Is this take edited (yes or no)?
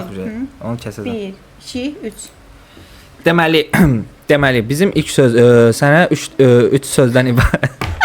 no